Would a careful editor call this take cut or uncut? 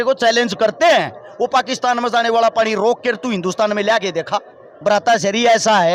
cut